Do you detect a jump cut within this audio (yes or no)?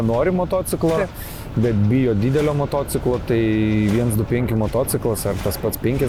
no